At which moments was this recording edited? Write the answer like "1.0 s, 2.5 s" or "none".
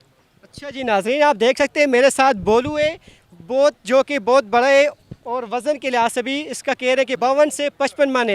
7.2 s